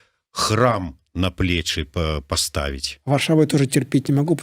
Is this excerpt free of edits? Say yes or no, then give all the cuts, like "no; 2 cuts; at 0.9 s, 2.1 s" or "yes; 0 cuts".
no; 1 cut; at 2.9 s